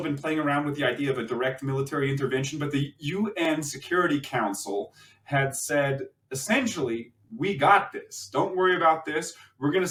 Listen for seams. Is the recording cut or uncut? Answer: uncut